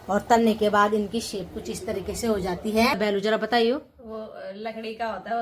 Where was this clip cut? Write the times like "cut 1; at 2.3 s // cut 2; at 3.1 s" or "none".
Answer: cut 1; at 3.0 s